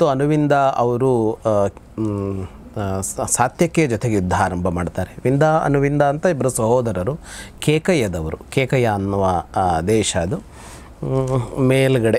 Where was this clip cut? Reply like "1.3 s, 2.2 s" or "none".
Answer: none